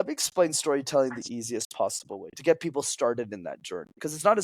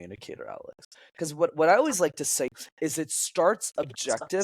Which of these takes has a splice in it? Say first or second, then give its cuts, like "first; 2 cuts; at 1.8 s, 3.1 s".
second; 1 cut; at 2.5 s